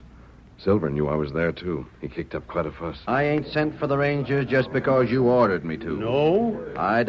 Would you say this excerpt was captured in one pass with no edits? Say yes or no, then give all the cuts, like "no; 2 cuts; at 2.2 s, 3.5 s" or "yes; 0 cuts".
no; 1 cut; at 2.9 s